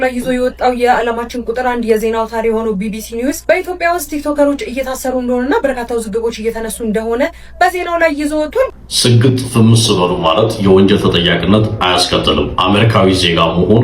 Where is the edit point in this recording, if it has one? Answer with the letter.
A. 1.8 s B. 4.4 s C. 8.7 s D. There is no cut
C